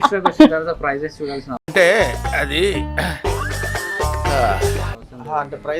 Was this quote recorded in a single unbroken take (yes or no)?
yes